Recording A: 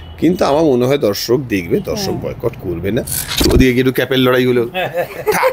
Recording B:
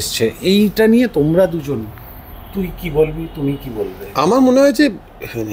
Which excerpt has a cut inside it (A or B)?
A